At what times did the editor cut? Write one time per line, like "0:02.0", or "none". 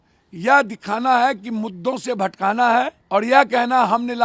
0:03.0